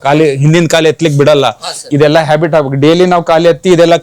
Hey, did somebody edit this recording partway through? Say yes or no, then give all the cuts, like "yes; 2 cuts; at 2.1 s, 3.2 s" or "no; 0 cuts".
yes; 1 cut; at 1.9 s